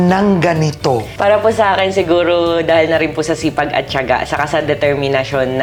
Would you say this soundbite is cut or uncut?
uncut